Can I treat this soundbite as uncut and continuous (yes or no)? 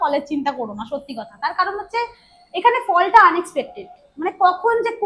yes